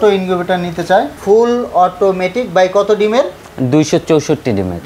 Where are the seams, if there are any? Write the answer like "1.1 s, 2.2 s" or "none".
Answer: 1.2 s